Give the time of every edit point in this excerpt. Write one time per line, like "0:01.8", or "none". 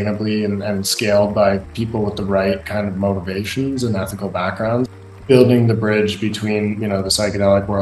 0:05.0